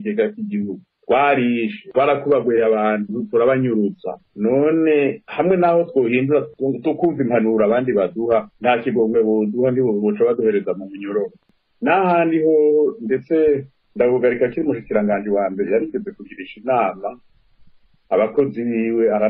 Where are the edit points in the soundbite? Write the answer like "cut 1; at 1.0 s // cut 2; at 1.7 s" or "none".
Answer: cut 1; at 11.5 s